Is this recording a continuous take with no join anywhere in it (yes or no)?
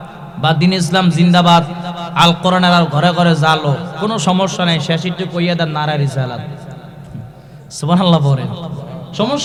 yes